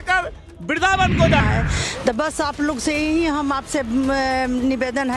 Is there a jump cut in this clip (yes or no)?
yes